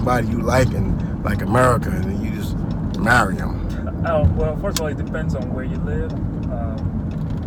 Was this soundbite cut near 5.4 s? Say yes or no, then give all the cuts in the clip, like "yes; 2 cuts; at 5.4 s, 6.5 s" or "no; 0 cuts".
no; 0 cuts